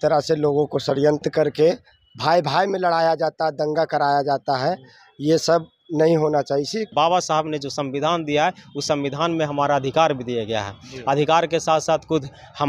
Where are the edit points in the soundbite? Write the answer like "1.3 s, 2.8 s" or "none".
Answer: 1.3 s, 6.9 s